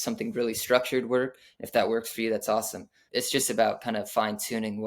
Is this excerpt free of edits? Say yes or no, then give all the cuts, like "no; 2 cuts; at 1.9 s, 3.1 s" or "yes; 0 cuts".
no; 1 cut; at 3.0 s